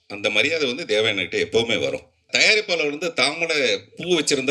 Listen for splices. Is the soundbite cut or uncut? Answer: cut